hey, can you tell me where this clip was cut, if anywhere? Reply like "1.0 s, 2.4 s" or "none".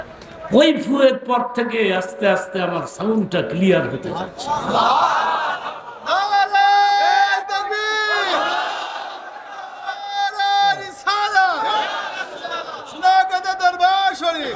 none